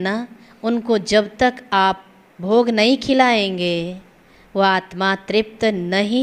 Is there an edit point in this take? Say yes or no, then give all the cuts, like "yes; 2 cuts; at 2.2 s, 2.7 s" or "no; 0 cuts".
no; 0 cuts